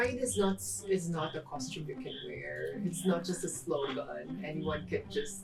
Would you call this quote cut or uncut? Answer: uncut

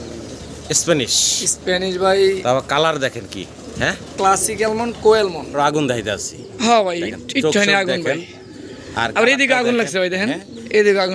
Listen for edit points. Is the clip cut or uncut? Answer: cut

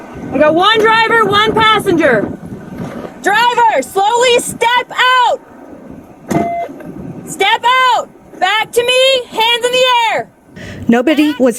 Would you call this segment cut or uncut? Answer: uncut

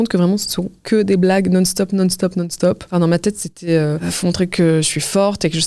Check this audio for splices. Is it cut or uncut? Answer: cut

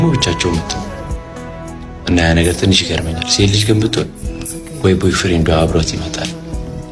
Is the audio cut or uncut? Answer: uncut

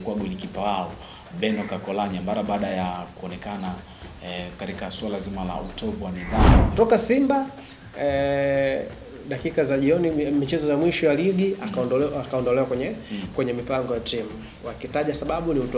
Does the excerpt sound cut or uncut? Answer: cut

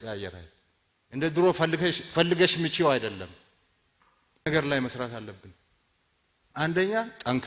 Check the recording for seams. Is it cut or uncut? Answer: cut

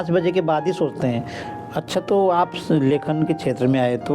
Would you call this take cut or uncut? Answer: cut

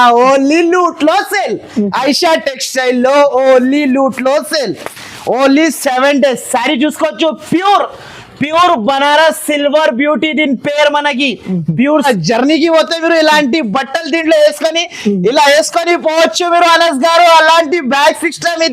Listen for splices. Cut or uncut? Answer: cut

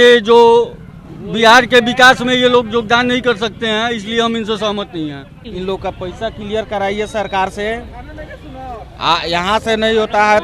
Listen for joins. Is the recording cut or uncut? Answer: cut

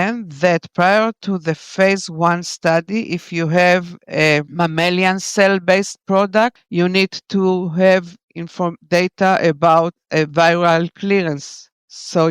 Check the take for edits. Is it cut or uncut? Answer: cut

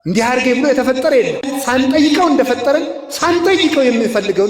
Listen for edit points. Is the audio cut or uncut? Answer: cut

